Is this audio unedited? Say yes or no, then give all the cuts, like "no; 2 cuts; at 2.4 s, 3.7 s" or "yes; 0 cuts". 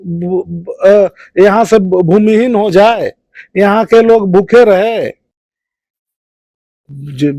yes; 0 cuts